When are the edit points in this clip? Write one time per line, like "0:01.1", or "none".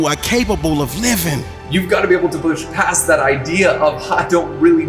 0:01.5